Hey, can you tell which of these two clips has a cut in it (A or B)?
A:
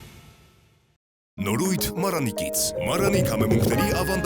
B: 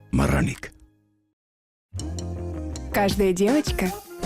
A